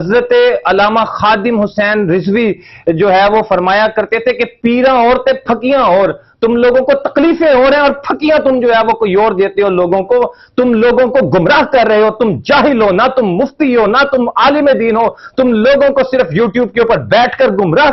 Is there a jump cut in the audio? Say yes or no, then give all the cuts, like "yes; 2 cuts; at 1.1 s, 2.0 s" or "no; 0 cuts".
no; 0 cuts